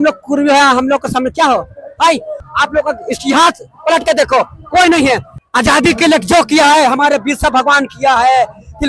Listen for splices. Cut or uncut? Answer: cut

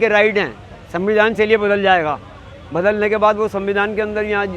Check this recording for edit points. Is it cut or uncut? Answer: uncut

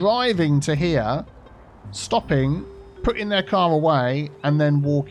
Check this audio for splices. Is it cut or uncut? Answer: uncut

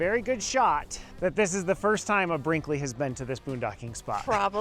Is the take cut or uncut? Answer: cut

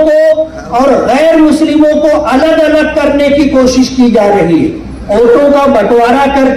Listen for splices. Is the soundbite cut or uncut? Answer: cut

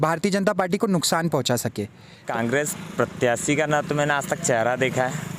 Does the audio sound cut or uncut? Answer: cut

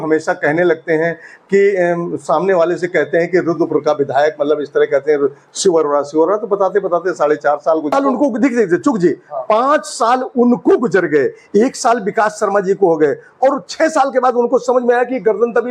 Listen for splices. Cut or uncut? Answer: cut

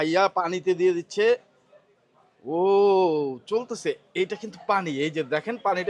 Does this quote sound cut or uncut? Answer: uncut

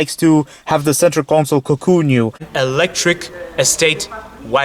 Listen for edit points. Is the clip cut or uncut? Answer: cut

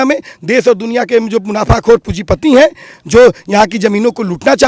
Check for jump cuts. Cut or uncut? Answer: uncut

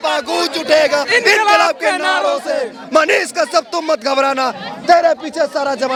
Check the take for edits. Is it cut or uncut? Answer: uncut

